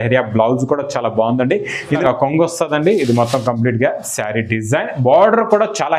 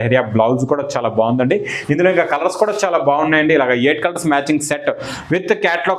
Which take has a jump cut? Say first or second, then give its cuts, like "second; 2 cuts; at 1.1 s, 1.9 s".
first; 1 cut; at 1.9 s